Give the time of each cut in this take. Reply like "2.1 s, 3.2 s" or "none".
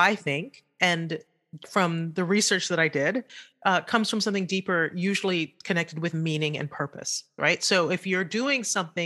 1.0 s